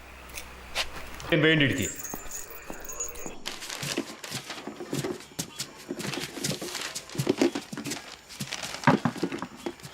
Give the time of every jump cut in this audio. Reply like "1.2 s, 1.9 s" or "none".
1.3 s